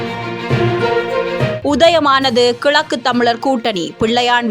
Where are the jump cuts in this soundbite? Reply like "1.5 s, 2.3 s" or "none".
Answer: none